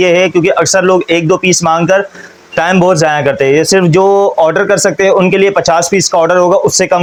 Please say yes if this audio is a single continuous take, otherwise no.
yes